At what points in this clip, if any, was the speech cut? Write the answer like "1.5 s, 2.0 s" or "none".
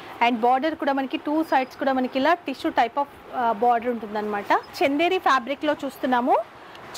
4.7 s